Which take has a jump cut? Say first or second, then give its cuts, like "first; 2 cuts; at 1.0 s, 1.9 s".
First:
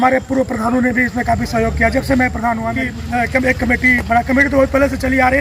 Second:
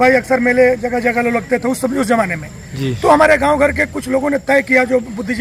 first; 1 cut; at 2.9 s